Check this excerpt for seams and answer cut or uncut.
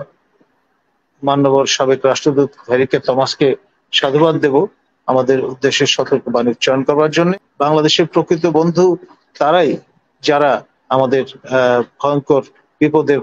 cut